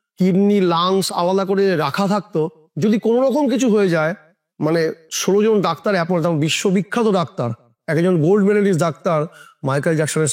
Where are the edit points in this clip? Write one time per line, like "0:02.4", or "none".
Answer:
none